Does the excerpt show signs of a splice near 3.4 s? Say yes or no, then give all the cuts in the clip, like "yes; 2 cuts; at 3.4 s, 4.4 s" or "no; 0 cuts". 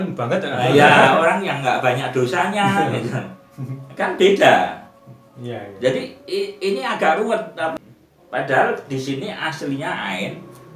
no; 1 cut; at 7.8 s